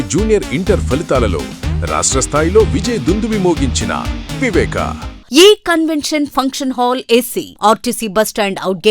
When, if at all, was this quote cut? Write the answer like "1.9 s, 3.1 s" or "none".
5.1 s